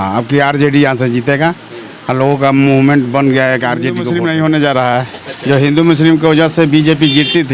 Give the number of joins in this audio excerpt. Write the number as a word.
one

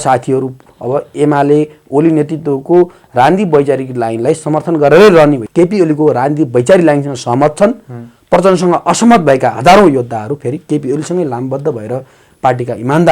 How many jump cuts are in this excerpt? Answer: two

